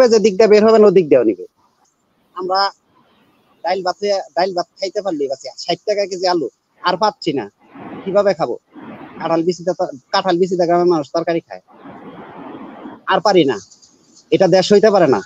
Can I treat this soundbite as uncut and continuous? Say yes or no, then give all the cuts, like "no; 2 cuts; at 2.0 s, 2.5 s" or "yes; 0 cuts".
no; 1 cut; at 1.8 s